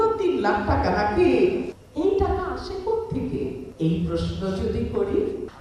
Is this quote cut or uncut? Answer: uncut